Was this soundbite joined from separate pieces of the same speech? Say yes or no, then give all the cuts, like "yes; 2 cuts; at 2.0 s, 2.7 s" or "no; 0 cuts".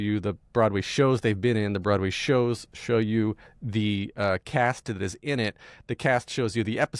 no; 0 cuts